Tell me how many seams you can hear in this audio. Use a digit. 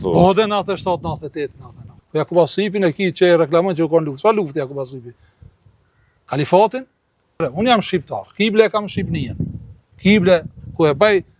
2